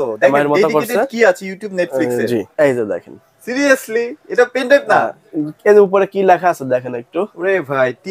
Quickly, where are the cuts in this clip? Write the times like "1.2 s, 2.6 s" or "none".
2.5 s